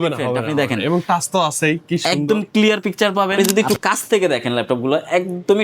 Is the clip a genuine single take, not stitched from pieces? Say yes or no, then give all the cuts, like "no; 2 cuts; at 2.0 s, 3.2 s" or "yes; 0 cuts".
no; 1 cut; at 3.3 s